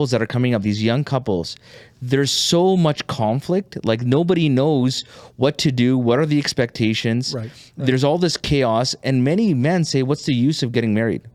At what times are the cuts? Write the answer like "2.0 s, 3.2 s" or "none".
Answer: none